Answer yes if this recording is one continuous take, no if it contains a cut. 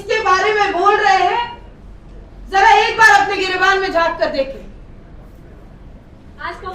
yes